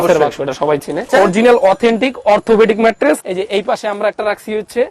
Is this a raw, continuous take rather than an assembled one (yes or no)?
no